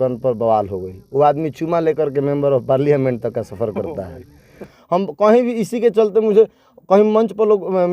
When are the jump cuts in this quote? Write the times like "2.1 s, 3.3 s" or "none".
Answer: 4.7 s